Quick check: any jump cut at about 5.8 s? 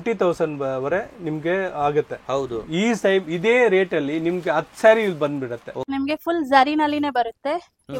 yes; 1 cut; at 5.8 s

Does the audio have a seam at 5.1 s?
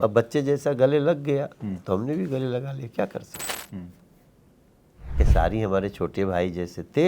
yes; 1 cut; at 5.1 s

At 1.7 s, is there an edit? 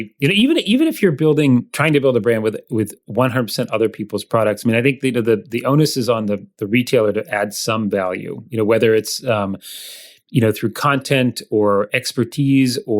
yes; 1 cut; at 1.7 s

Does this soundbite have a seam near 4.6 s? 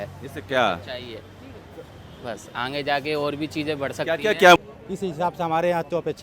yes; 1 cut; at 4.6 s

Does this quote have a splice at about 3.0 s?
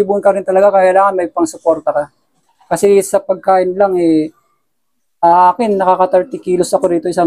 no; 0 cuts

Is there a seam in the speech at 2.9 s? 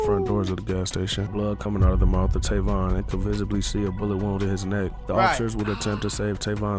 no; 1 cut; at 1.3 s

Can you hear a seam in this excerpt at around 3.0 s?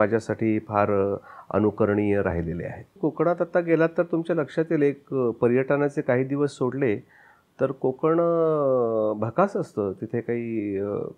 yes; 1 cut; at 3.0 s

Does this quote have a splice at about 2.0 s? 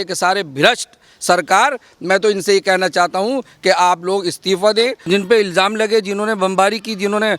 no; 1 cut; at 5.0 s

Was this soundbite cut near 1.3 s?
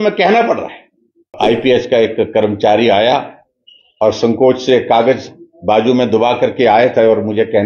yes; 1 cut; at 1.3 s

